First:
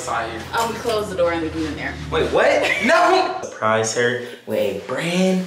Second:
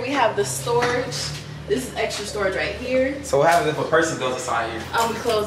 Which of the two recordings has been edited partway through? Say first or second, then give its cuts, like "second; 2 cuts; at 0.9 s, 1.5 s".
first; 1 cut; at 3.4 s